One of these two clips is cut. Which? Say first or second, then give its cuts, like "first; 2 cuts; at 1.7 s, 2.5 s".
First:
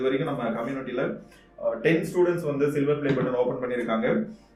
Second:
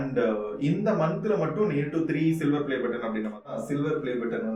second; 1 cut; at 3.5 s